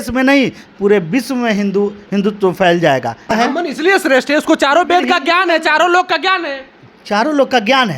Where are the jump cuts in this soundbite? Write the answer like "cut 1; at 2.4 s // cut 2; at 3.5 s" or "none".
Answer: cut 1; at 3.3 s